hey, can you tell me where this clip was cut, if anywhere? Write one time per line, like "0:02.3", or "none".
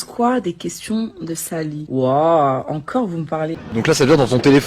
0:01.8
0:03.6